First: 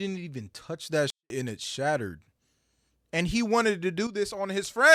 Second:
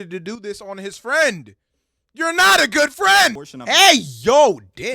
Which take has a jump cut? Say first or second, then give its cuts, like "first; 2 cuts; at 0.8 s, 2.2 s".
second; 1 cut; at 3.5 s